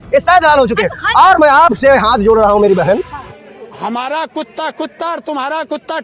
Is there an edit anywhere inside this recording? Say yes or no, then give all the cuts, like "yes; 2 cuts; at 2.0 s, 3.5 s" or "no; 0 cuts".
yes; 1 cut; at 3.2 s